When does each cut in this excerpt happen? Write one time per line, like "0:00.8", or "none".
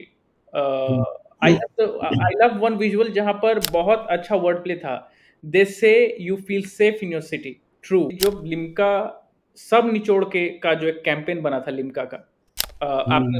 0:08.2